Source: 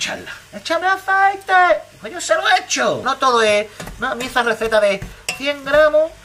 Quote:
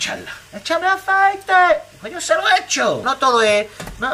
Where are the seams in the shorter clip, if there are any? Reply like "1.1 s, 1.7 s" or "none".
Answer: none